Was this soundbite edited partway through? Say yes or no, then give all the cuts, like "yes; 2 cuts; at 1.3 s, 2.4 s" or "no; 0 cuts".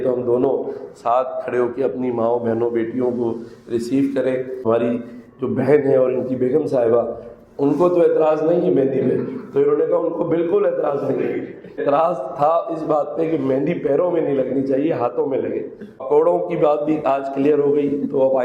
yes; 3 cuts; at 4.6 s, 11.8 s, 16.0 s